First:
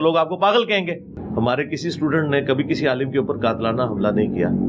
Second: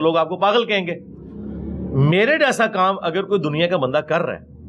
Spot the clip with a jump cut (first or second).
first